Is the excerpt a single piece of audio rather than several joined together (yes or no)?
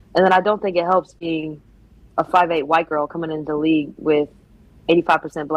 no